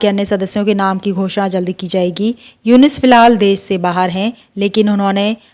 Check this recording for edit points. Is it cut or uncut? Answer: uncut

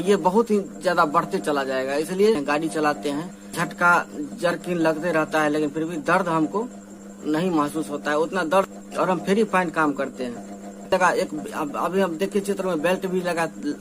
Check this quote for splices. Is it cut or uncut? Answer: cut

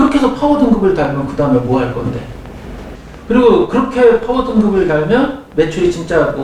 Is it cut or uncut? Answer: cut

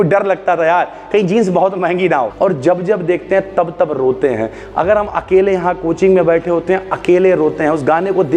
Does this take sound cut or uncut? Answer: cut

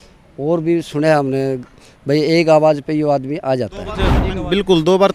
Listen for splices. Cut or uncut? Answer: cut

